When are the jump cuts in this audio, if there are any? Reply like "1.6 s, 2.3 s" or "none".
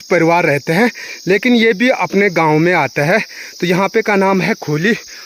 none